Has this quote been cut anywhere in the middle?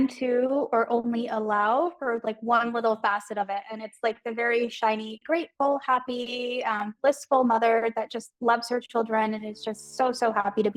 no; 0 cuts

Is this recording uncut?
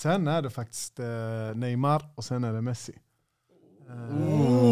yes; 0 cuts

